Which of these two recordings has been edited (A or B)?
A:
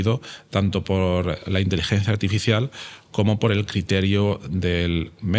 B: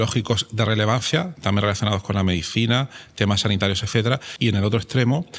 B